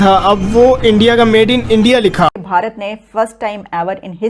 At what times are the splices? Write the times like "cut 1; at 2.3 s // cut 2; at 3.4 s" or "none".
cut 1; at 2.3 s